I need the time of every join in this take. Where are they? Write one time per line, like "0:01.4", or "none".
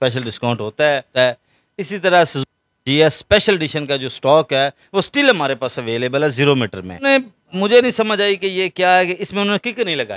0:01.1
0:07.1